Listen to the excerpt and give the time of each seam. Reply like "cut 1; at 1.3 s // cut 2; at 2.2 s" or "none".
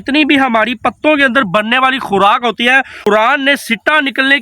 cut 1; at 3.0 s